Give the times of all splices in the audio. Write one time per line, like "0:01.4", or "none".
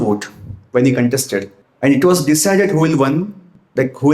0:01.6